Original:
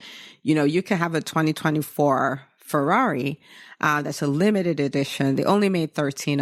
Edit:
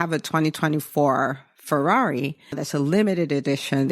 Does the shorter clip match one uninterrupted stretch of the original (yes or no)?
no